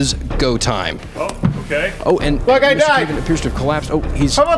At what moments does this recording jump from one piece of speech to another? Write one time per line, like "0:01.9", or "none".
0:01.1